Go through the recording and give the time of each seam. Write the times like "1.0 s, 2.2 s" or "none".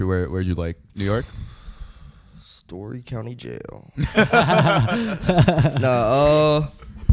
none

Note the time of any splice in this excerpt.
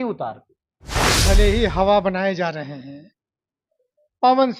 1.2 s

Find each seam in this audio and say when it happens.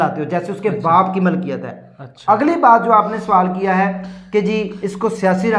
none

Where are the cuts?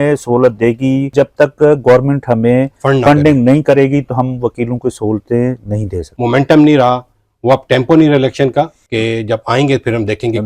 1.1 s, 6.1 s, 8.8 s

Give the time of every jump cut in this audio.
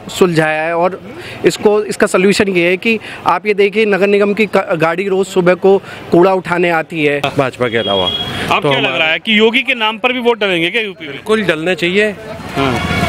7.3 s

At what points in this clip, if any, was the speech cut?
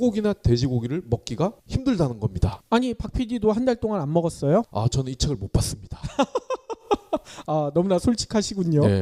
4.9 s

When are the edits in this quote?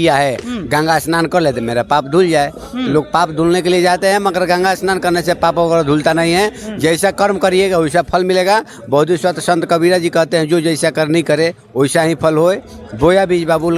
none

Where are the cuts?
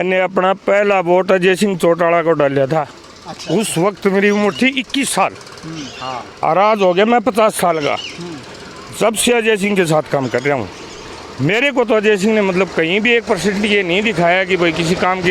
none

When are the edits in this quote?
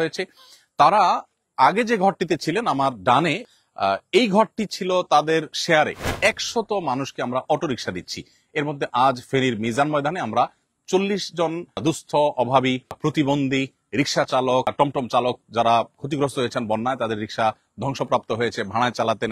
3.5 s, 6.1 s, 11.8 s, 13.0 s, 14.7 s

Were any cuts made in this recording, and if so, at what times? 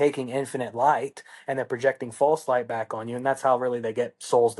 none

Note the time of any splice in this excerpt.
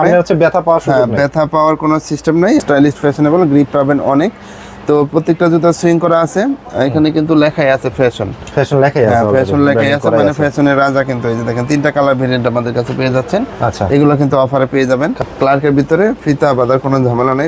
2.6 s, 15.2 s

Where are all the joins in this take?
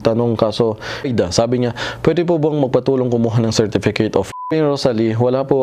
1.1 s, 4.5 s

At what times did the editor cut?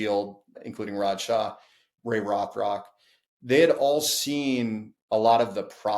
1.9 s

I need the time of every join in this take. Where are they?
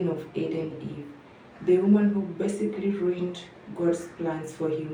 none

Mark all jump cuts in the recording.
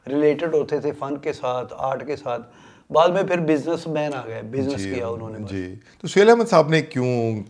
none

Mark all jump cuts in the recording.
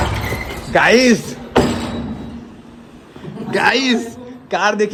none

